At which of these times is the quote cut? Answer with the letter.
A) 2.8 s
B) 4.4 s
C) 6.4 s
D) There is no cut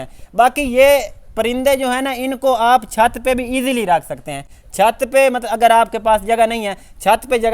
D